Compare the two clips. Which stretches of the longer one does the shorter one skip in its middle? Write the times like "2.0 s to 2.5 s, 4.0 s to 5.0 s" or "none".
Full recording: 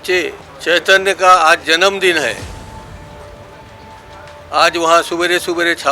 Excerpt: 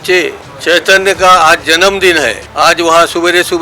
2.4 s to 4.4 s

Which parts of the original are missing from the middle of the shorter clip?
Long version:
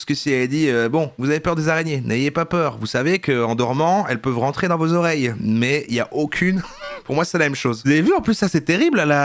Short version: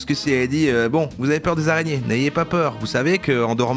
none

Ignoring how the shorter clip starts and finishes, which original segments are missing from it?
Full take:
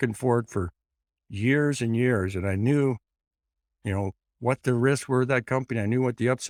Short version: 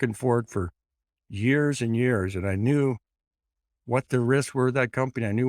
3.7 s to 4.2 s

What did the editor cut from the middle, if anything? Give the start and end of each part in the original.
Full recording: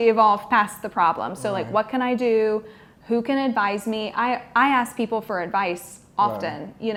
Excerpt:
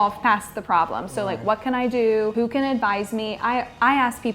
2.6 s to 3.1 s

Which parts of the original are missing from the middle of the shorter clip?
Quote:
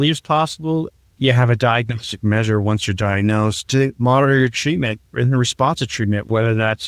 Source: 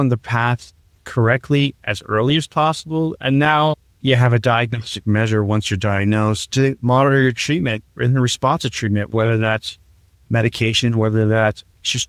3.2 s to 3.8 s

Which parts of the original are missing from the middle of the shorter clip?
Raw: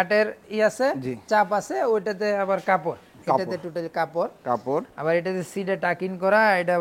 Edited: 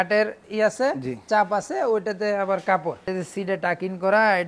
3.1 s to 5.3 s

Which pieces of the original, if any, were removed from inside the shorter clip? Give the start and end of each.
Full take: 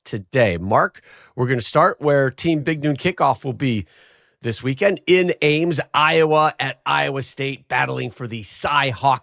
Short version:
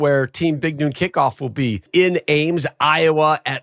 3.9 s to 5.0 s

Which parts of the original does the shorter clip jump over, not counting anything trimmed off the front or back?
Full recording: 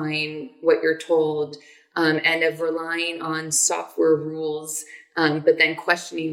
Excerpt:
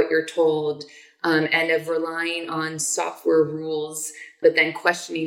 5.1 s to 5.4 s

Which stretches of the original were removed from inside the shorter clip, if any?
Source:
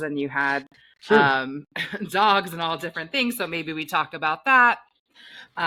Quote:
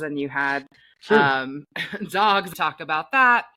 2.5 s to 3.8 s

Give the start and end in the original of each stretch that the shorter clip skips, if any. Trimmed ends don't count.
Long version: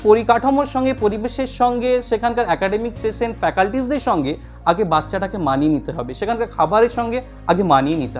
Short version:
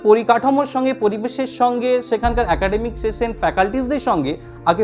none

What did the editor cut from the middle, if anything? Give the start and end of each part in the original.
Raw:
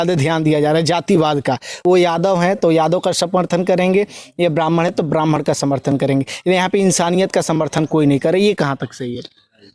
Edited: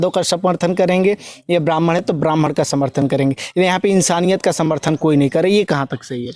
none

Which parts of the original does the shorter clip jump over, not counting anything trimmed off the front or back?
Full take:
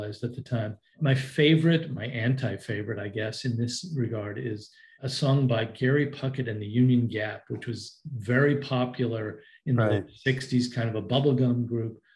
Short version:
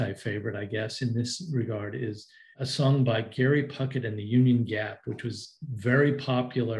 none

